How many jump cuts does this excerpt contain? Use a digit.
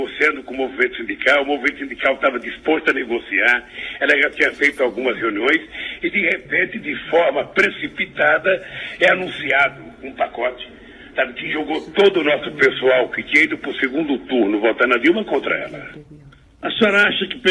1